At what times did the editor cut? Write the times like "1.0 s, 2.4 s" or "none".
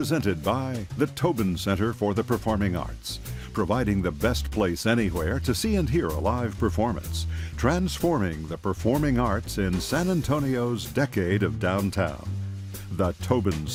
none